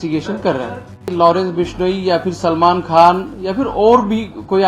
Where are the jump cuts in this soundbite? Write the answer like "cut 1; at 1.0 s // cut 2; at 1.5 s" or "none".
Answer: cut 1; at 1.0 s